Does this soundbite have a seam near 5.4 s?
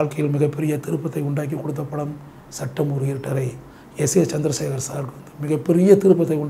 no; 0 cuts

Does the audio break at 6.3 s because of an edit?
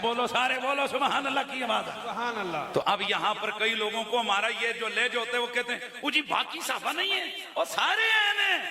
no; 1 cut; at 2.7 s

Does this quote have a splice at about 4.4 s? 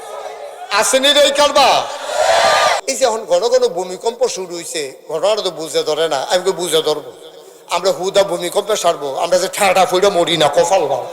no; 1 cut; at 2.8 s

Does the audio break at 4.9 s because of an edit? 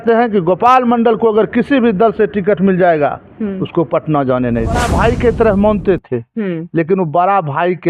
yes; 1 cut; at 4.9 s

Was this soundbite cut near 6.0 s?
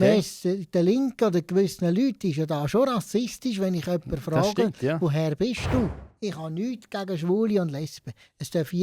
yes; 1 cut; at 6.0 s

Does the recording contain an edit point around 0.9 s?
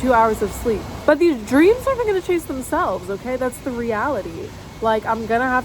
yes; 1 cut; at 0.9 s

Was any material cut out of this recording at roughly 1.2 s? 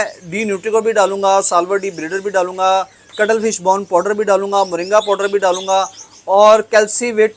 no; 0 cuts

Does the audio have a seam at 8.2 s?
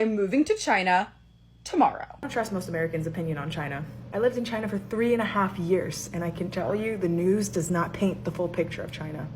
no; 1 cut; at 2.1 s

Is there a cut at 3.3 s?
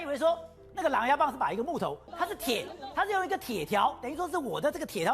no; 1 cut; at 2.0 s

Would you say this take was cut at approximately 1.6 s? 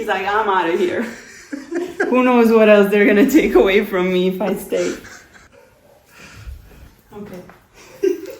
no; 2 cuts; at 5.4 s, 6.9 s

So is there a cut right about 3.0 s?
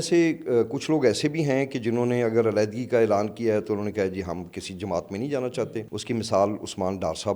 no; 1 cut; at 5.9 s

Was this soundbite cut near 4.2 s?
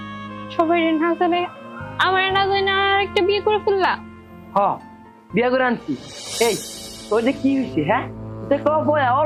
no; 0 cuts

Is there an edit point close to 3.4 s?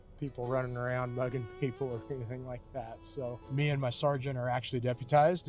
yes; 1 cut; at 3.4 s

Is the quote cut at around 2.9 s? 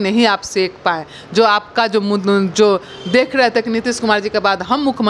no; 0 cuts

